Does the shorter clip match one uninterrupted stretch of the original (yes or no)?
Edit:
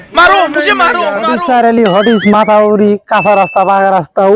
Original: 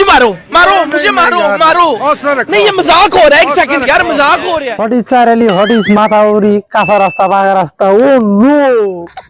no